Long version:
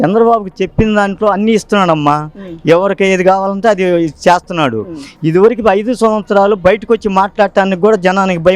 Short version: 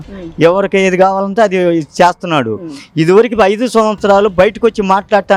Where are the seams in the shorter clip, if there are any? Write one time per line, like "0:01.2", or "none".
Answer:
none